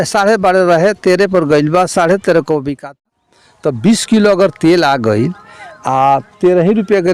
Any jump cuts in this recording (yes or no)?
yes